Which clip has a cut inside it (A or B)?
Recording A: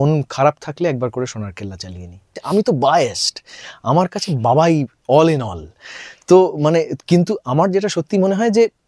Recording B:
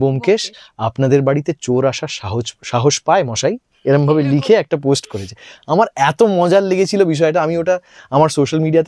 A